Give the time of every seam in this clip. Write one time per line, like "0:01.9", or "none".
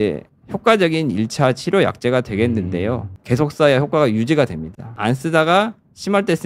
0:03.1